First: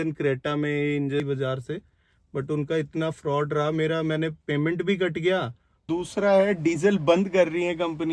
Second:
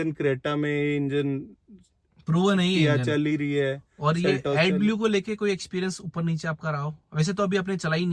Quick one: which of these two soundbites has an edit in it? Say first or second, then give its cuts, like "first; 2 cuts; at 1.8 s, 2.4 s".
first; 2 cuts; at 1.2 s, 5.8 s